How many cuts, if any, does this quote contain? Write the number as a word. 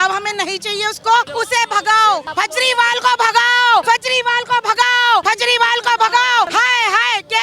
five